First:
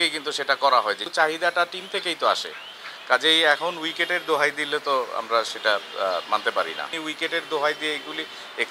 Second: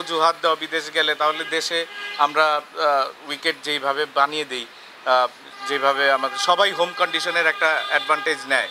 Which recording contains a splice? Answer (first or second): first